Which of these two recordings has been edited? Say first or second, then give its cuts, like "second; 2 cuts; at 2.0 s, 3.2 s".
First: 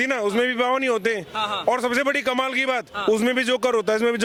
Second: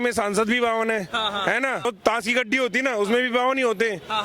second; 1 cut; at 1.9 s